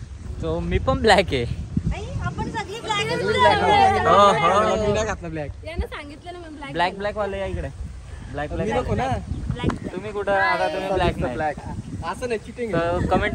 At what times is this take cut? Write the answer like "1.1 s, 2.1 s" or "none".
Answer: none